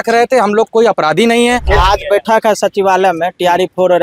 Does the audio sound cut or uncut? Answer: cut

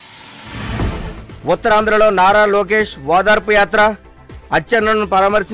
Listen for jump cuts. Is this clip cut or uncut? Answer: cut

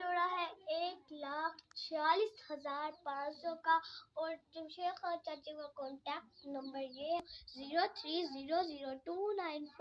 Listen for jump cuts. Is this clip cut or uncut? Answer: cut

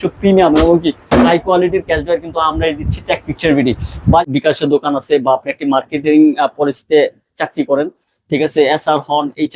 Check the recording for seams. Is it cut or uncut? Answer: cut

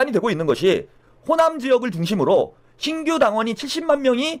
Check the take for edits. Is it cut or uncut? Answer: uncut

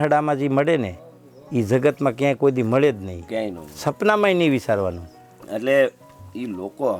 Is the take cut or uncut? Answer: uncut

